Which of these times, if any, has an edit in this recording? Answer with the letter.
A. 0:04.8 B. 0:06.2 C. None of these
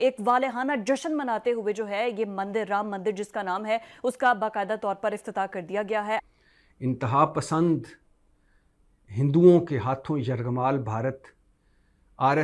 B